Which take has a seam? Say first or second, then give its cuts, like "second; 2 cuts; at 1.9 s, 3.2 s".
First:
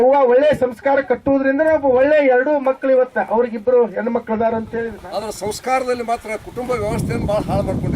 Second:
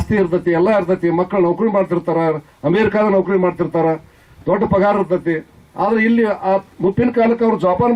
first; 1 cut; at 4.8 s